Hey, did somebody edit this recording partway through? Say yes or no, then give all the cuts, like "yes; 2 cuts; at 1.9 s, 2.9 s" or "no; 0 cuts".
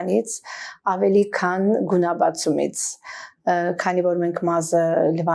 no; 0 cuts